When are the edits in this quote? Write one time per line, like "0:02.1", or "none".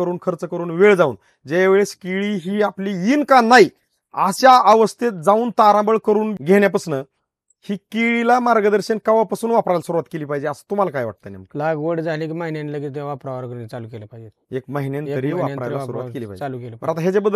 0:06.3